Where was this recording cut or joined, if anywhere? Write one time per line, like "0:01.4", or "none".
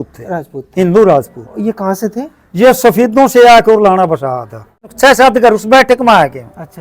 0:04.9

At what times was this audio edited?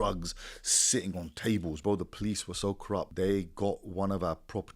0:01.8
0:03.1

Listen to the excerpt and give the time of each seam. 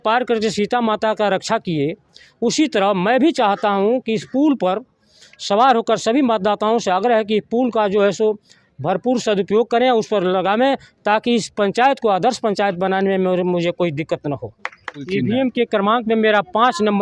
0:15.1

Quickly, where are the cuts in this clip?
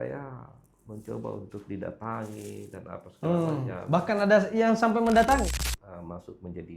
0:05.6

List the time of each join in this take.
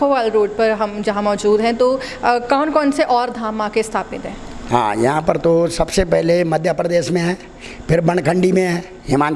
none

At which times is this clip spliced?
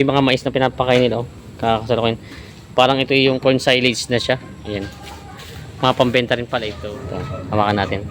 0:06.7

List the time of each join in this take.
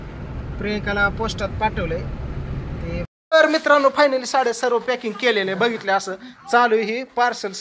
0:03.2

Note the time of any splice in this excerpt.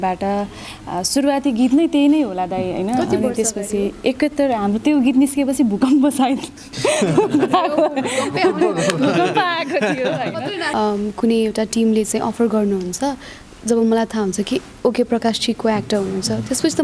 0:10.6

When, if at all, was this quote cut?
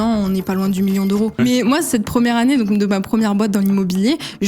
0:01.4

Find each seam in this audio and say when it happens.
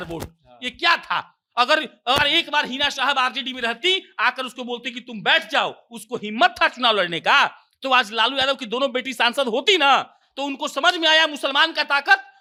none

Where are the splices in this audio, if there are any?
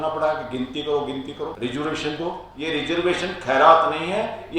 0:01.5
0:02.5

